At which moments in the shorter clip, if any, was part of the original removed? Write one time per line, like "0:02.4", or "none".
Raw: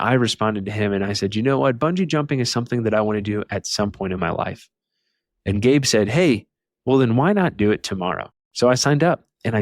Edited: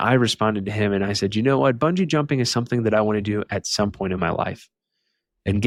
none